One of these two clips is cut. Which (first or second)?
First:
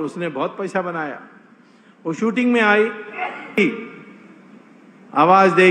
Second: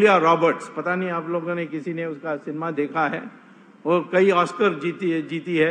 first